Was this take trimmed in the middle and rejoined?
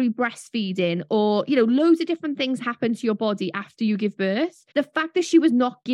no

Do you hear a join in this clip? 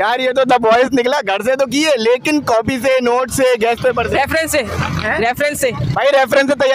no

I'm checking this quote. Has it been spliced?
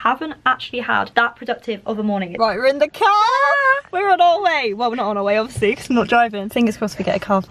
yes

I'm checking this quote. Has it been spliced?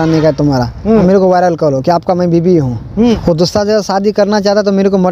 yes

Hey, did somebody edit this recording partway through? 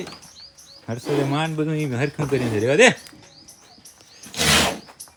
no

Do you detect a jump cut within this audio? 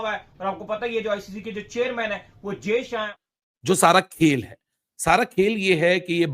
yes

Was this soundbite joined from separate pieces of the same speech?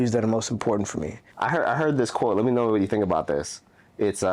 yes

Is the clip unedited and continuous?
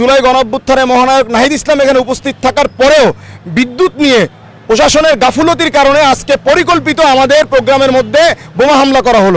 yes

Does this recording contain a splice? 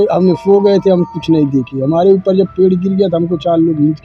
no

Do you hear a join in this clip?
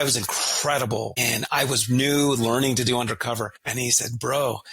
yes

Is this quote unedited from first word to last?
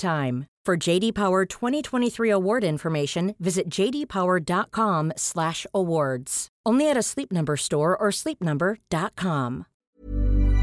no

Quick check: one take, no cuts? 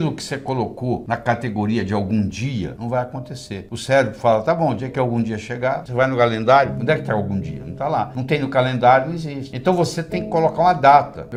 yes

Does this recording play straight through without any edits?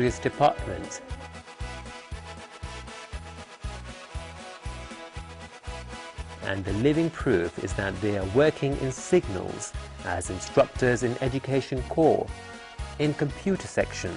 no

